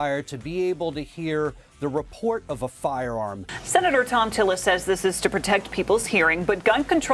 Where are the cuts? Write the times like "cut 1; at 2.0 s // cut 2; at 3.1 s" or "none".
none